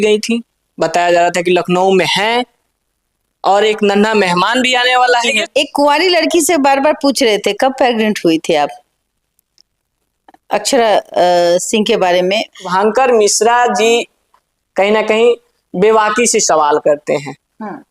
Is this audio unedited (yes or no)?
no